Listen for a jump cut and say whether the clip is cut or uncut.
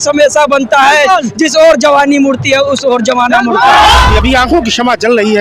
cut